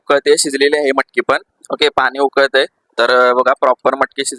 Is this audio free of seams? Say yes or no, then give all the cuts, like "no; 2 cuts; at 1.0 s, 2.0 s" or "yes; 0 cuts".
yes; 0 cuts